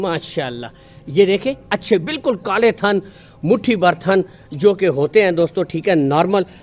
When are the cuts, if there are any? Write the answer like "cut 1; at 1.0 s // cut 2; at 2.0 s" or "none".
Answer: none